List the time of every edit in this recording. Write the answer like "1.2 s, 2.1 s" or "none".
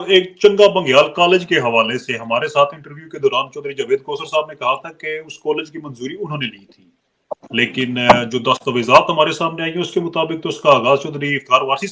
none